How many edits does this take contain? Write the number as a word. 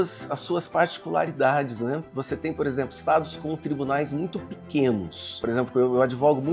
one